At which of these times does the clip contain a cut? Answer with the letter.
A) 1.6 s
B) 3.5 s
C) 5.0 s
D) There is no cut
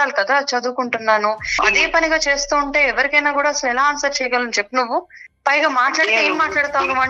A